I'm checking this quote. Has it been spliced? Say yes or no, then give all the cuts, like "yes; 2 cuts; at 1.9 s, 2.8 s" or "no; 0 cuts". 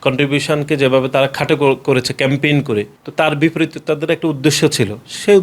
no; 0 cuts